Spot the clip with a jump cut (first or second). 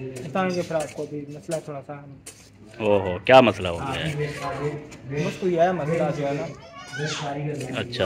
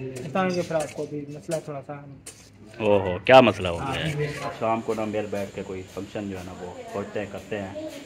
second